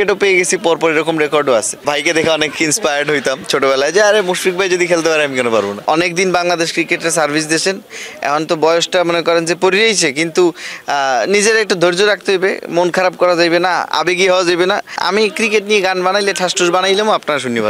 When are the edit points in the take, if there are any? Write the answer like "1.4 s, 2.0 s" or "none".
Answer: 1.8 s, 5.8 s, 15.0 s